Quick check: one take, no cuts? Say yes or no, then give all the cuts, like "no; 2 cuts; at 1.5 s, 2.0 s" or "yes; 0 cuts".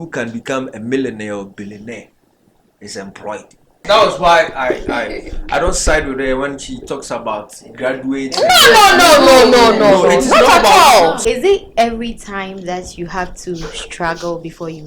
no; 2 cuts; at 3.8 s, 11.2 s